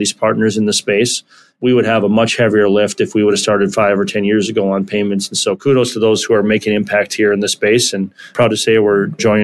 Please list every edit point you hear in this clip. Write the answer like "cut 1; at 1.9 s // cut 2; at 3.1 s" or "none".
cut 1; at 8.2 s